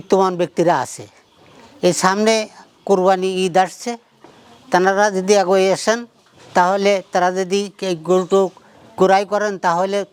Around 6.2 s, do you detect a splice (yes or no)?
no